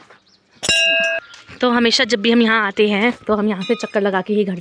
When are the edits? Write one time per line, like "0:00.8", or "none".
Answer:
0:01.2